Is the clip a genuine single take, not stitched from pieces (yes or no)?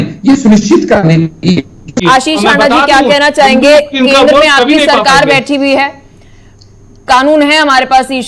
no